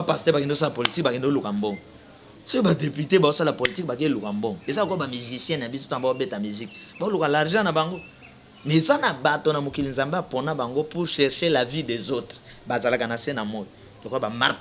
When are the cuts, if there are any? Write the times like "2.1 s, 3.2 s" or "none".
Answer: none